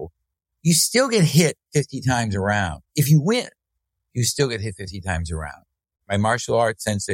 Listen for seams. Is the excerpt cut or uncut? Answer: cut